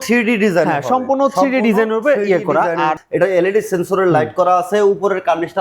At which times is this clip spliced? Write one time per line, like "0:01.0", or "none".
0:03.0